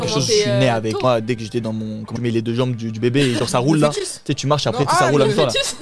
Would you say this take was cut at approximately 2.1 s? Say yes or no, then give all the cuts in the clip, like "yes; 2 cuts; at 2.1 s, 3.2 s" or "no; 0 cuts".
yes; 2 cuts; at 1.0 s, 2.1 s